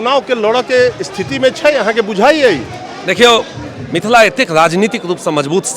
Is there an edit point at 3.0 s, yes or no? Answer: no